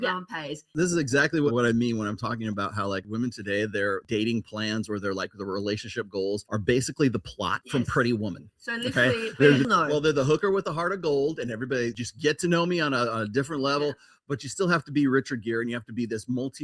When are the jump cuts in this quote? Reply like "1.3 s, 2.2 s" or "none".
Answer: 1.5 s